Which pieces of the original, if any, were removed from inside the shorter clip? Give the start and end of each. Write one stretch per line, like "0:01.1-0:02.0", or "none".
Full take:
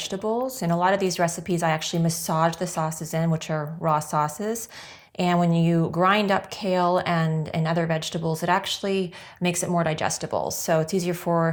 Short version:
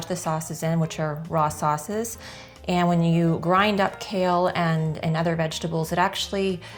none